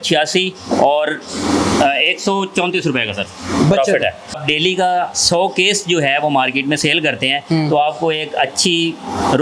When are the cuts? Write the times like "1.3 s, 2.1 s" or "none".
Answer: 4.3 s